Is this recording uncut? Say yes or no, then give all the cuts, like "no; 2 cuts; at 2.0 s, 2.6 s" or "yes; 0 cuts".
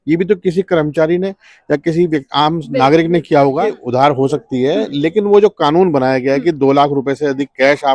no; 1 cut; at 3.8 s